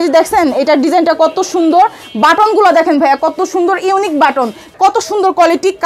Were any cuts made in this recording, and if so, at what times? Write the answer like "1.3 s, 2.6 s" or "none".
4.7 s